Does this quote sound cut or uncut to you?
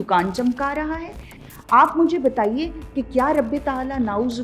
cut